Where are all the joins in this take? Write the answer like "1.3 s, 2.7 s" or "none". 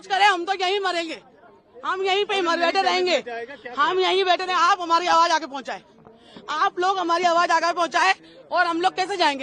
none